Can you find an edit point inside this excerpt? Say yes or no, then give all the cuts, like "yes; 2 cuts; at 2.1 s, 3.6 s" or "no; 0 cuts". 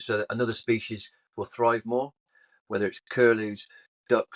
no; 0 cuts